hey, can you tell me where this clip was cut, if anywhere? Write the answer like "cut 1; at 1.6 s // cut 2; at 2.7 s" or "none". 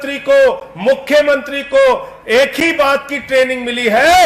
none

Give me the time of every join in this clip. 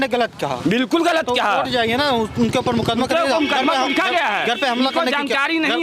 none

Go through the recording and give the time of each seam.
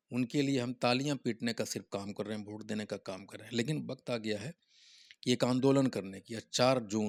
none

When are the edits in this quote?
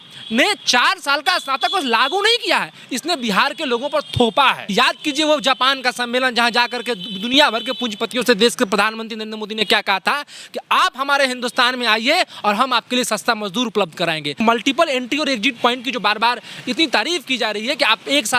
cut 1; at 4.6 s // cut 2; at 14.4 s

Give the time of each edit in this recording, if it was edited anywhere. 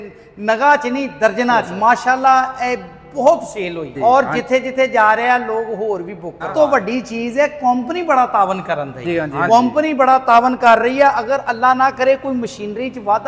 cut 1; at 1.7 s // cut 2; at 3.9 s // cut 3; at 6.4 s // cut 4; at 9.0 s

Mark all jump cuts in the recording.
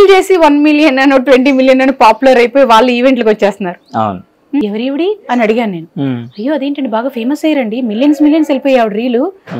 cut 1; at 4.6 s

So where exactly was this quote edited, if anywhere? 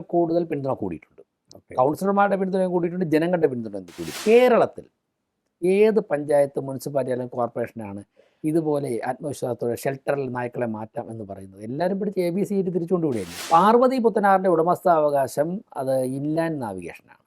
cut 1; at 4.2 s // cut 2; at 13.3 s

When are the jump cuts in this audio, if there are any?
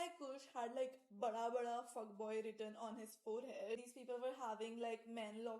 cut 1; at 3.9 s

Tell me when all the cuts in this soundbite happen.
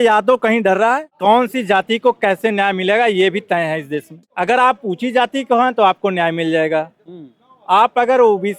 cut 1; at 1.1 s // cut 2; at 4.2 s

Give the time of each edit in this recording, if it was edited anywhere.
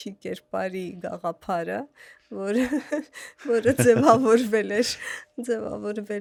none

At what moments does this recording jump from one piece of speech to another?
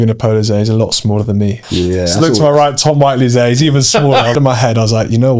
cut 1; at 1.6 s // cut 2; at 4.3 s

